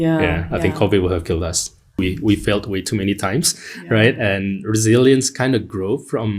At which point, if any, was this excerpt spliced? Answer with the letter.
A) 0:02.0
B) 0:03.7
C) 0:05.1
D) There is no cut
A